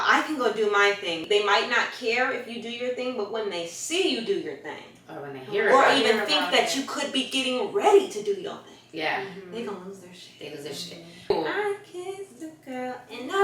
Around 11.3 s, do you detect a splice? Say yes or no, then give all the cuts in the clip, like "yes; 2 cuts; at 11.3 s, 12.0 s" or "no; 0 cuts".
yes; 2 cuts; at 1.2 s, 11.3 s